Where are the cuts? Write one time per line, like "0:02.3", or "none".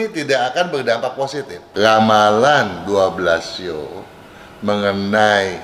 0:01.6